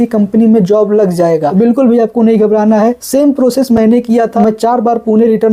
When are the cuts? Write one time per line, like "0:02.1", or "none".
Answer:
0:01.4
0:03.0
0:04.3